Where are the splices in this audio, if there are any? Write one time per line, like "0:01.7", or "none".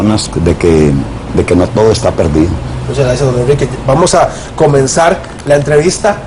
none